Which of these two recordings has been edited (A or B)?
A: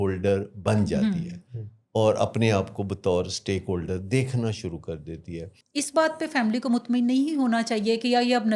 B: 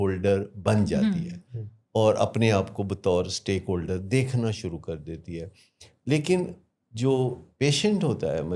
A